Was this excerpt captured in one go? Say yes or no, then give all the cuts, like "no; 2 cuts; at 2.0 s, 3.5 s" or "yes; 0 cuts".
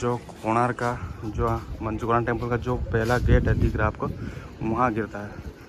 yes; 0 cuts